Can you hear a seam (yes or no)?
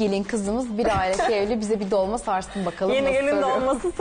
no